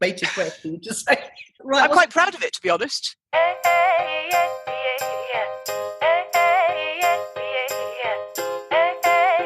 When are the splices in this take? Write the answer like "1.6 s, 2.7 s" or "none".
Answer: 1.6 s, 3.2 s, 8.5 s